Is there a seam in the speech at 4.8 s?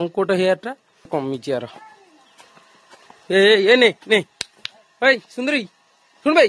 no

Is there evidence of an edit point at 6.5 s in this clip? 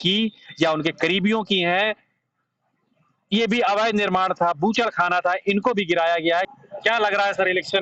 yes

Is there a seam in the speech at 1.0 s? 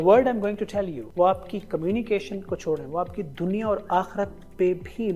yes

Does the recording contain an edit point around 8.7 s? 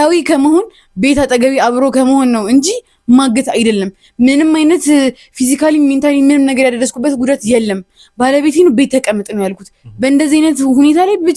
no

